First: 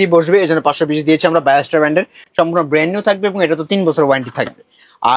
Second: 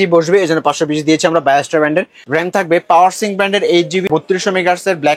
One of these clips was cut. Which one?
second; 2 cuts; at 2.2 s, 4.1 s

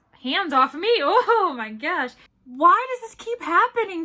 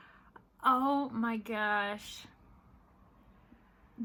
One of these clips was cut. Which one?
first; 1 cut; at 2.2 s

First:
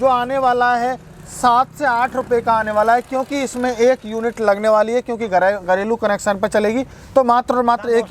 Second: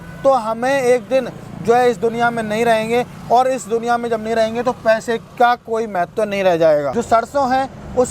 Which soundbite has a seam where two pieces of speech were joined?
second; 1 cut; at 6.9 s

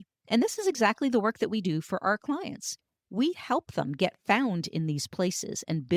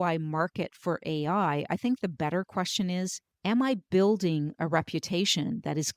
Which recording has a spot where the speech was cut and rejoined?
second; 1 cut; at 3.2 s

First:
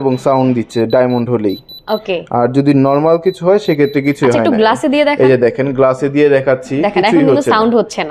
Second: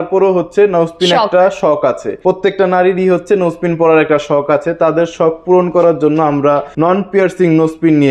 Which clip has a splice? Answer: second; 2 cuts; at 2.1 s, 6.7 s

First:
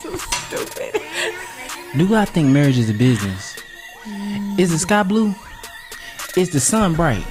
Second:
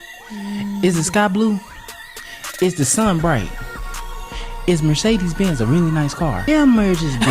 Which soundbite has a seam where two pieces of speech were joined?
second; 1 cut; at 6.4 s

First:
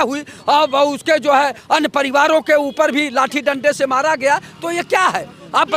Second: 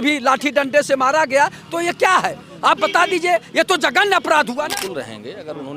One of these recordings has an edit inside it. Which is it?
second; 1 cut; at 4.6 s

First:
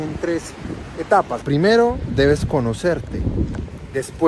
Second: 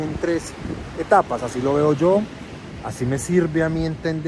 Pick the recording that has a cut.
first; 1 cut; at 1.4 s

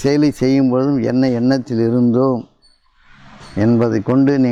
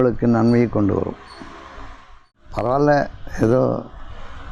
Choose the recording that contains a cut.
second; 1 cut; at 2.4 s

